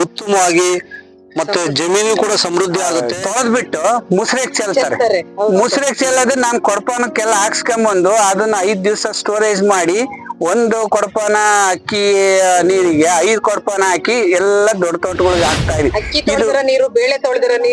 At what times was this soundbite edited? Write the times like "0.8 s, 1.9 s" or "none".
3.1 s